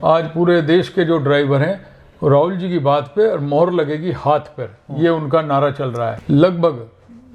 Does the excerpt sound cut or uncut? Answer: cut